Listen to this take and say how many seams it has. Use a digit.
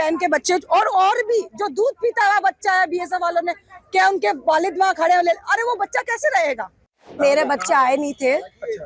1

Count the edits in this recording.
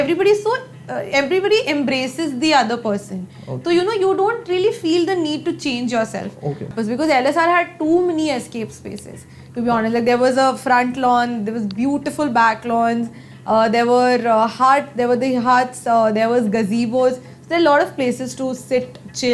1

